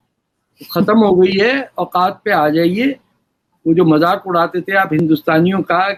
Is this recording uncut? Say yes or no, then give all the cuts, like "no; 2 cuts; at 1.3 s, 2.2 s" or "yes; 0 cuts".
yes; 0 cuts